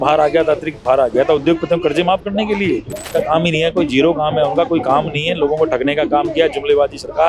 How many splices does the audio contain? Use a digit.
1